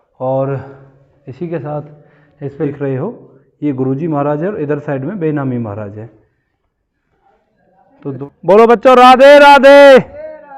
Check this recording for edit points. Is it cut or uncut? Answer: cut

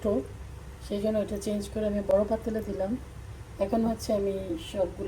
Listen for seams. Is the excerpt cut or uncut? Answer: uncut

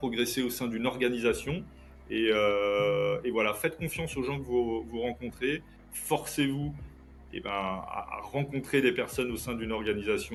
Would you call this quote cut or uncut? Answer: uncut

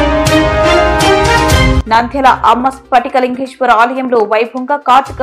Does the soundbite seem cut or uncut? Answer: cut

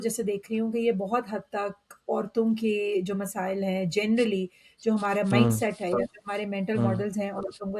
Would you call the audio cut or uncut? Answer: uncut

